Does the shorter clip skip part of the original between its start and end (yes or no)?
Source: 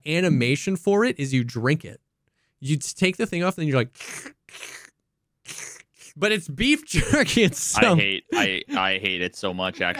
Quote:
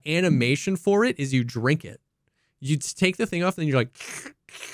no